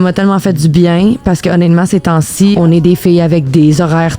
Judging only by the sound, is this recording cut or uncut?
cut